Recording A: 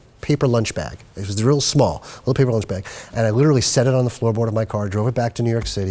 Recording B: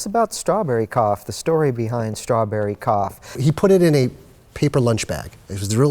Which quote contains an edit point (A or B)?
B